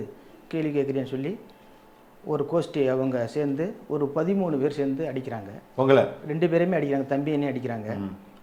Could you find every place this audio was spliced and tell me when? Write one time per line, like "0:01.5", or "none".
none